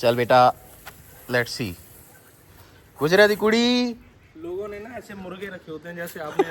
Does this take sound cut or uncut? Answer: uncut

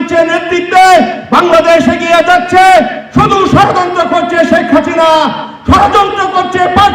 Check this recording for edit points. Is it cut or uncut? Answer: uncut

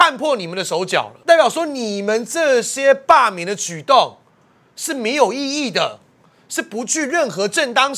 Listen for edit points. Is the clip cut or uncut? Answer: uncut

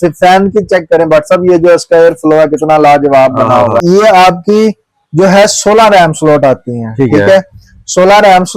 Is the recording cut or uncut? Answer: cut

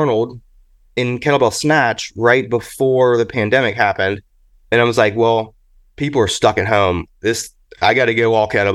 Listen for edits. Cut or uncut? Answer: cut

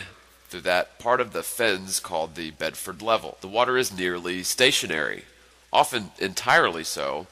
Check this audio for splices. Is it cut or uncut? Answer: cut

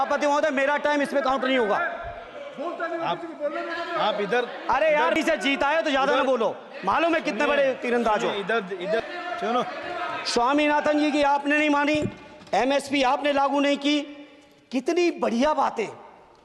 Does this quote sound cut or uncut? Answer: uncut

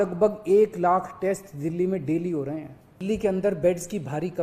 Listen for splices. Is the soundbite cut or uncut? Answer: cut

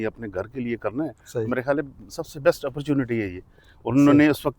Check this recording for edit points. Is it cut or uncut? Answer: uncut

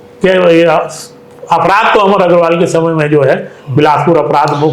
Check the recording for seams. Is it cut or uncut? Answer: uncut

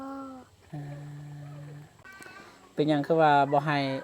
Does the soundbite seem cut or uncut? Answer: cut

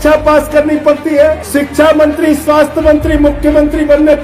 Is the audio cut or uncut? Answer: cut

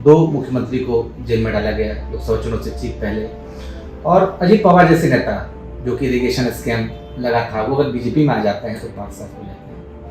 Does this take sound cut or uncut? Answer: uncut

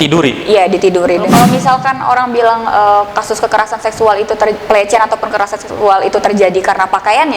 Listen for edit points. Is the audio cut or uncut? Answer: cut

